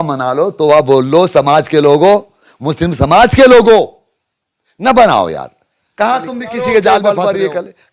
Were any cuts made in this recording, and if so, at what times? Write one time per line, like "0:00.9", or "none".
0:07.0